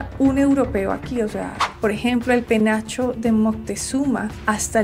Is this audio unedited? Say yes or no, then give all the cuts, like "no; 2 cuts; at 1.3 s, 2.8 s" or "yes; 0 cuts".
no; 1 cut; at 1.7 s